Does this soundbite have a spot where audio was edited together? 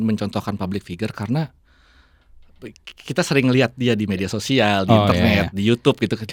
no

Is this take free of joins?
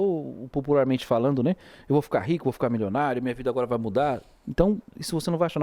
yes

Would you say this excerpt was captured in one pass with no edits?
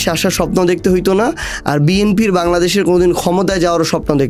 yes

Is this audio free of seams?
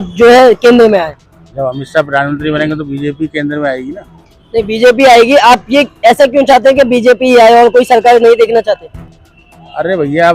yes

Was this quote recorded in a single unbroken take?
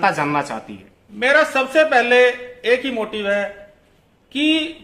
yes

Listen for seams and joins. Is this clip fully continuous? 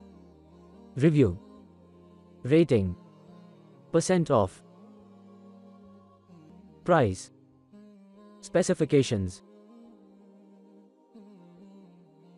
no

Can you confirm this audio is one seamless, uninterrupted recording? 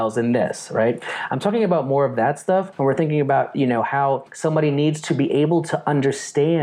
no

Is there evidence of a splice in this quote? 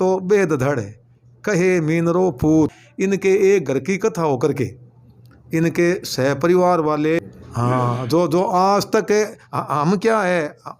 yes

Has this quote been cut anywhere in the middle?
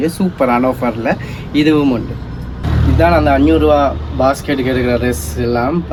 no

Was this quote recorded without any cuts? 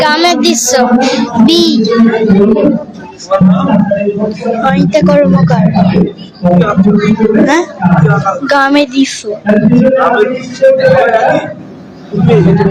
yes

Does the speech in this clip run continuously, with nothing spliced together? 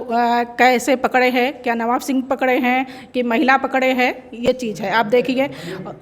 yes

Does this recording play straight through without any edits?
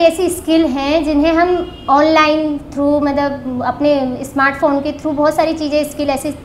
yes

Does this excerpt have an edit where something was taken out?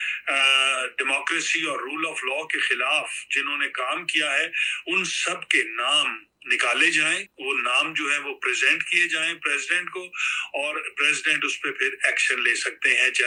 no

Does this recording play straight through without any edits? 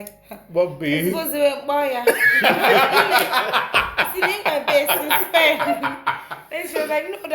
yes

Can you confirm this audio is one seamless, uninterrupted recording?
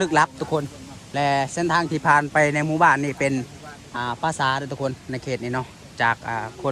yes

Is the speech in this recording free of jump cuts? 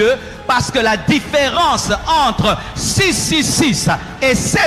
yes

